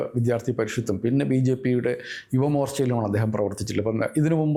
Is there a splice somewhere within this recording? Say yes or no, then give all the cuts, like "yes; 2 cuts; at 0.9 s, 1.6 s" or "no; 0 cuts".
no; 0 cuts